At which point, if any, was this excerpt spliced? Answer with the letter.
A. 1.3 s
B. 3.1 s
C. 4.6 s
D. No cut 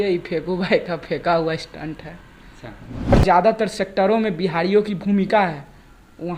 B